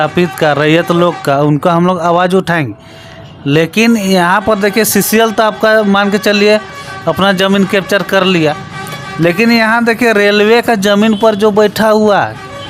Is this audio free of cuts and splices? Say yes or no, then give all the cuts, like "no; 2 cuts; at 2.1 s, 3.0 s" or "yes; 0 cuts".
yes; 0 cuts